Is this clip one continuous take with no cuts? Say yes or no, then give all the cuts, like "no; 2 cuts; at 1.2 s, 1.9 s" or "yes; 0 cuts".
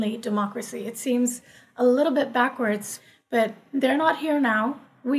no; 1 cut; at 2.9 s